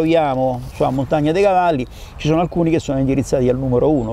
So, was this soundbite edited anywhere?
no; 0 cuts

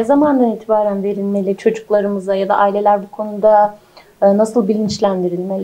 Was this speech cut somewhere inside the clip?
no; 0 cuts

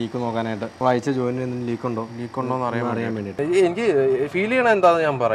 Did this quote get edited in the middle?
yes; 1 cut; at 3.4 s

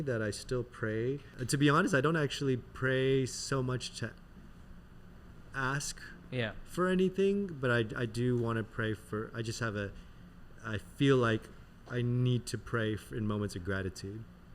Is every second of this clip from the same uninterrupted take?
no; 1 cut; at 1.3 s

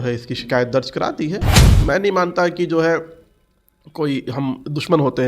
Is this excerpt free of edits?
no; 1 cut; at 1.7 s

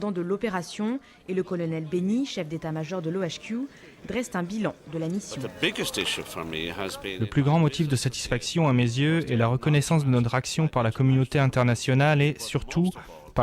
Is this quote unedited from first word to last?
no; 2 cuts; at 5.4 s, 7.1 s

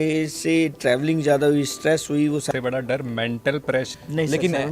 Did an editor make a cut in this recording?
yes; 2 cuts; at 2.4 s, 3.9 s

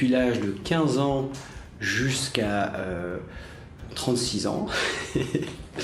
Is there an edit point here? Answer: yes; 1 cut; at 3.7 s

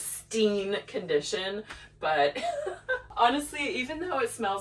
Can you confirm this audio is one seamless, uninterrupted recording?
no; 1 cut; at 3.1 s

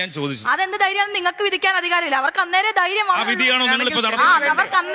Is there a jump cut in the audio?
no; 0 cuts

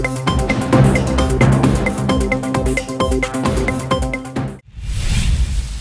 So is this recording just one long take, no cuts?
no; 1 cut; at 4.6 s

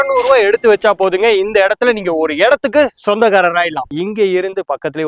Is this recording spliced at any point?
yes; 1 cut; at 3.9 s

